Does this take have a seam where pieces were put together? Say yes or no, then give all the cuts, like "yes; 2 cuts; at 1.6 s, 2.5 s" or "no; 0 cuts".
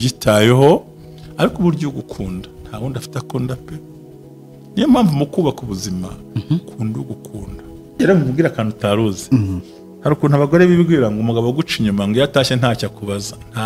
yes; 1 cut; at 8.0 s